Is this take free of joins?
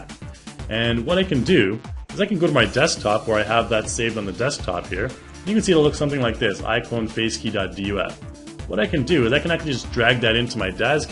yes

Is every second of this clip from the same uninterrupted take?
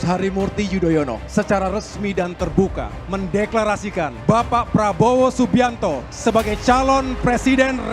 no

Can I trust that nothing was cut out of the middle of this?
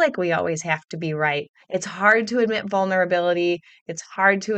yes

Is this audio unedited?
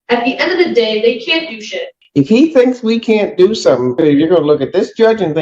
no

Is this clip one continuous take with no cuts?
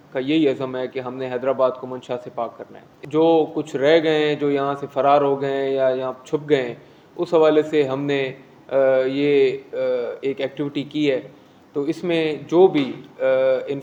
yes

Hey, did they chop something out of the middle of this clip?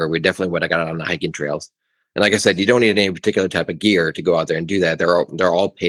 no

